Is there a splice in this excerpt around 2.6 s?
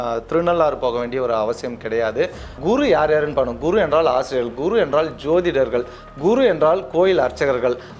yes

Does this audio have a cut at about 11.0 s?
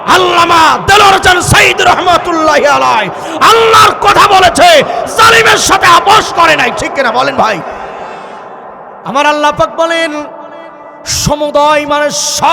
no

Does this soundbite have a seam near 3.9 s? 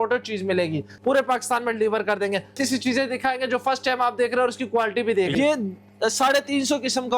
no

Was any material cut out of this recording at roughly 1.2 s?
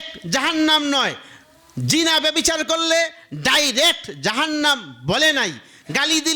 no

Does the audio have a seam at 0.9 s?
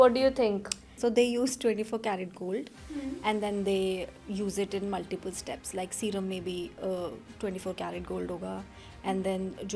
yes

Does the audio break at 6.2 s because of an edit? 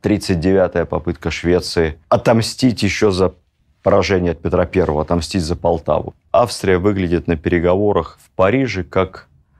yes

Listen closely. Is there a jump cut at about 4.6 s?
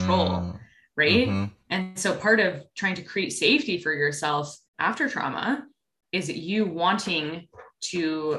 yes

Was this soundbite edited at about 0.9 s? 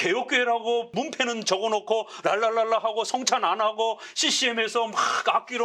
yes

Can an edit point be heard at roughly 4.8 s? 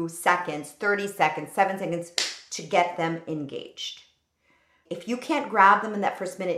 yes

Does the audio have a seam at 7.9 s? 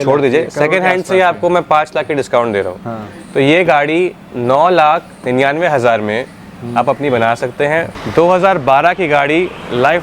yes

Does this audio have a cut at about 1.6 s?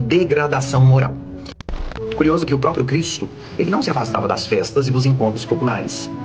yes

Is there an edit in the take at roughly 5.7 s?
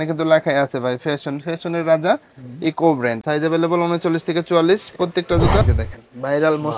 yes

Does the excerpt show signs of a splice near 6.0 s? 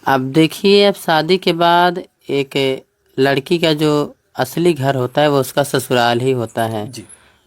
no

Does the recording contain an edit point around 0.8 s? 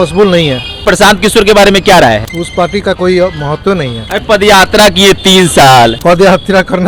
yes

